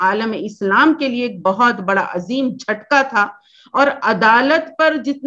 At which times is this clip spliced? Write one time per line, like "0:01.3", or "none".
none